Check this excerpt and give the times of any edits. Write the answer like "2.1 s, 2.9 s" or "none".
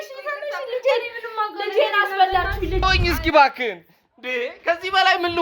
2.8 s